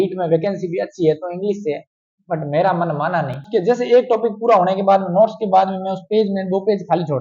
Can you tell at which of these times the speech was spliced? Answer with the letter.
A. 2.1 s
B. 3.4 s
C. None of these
B